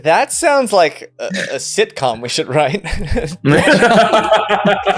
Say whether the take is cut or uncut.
uncut